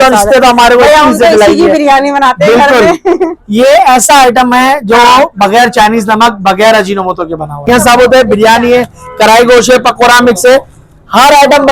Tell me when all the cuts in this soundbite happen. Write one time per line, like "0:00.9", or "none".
0:07.7